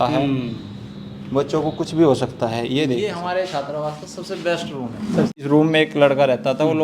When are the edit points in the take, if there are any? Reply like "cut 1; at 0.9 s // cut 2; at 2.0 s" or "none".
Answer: cut 1; at 3.1 s // cut 2; at 5.3 s